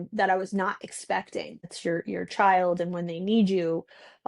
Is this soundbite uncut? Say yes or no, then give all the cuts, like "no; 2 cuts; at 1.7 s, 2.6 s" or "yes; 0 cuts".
no; 1 cut; at 1.6 s